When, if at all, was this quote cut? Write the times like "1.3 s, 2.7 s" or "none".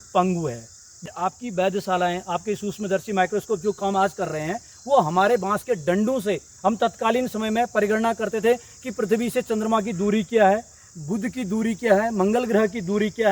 1.0 s